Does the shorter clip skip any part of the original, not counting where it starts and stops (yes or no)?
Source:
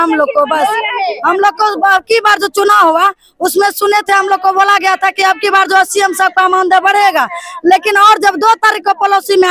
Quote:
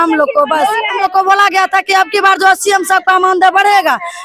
yes